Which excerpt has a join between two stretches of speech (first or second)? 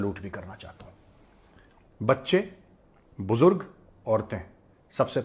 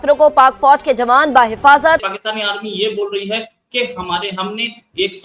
second